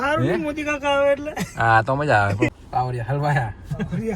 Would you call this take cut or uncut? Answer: cut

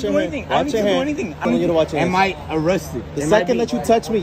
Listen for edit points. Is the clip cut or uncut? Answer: cut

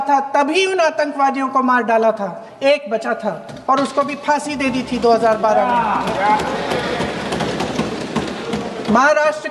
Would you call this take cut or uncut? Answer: uncut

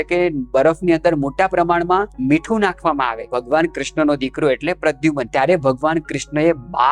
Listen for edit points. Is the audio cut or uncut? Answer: cut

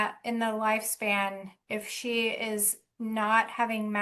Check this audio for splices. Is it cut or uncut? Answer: uncut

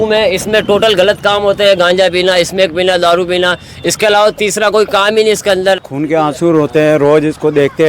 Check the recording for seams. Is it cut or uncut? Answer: cut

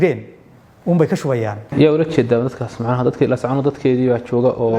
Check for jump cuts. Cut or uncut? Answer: cut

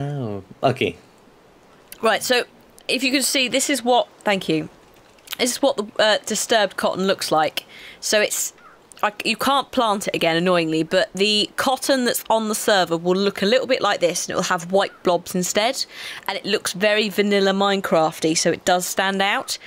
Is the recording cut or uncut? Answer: cut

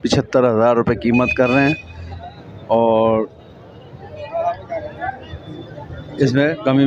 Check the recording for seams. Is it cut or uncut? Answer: uncut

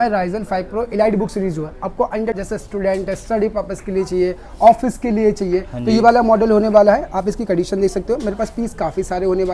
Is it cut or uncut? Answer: cut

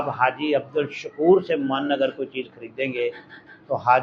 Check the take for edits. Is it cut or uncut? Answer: uncut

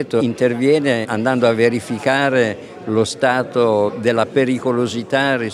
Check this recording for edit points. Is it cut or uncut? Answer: cut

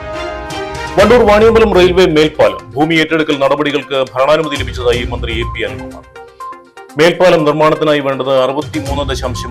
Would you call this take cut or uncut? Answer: uncut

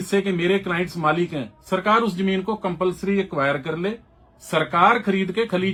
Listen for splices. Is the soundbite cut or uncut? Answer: uncut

